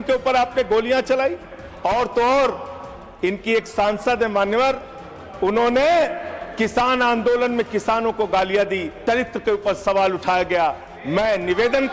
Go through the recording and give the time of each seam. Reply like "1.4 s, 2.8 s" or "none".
9.0 s